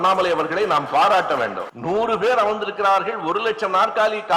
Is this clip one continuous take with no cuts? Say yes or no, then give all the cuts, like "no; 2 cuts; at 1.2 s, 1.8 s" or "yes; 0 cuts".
no; 1 cut; at 1.7 s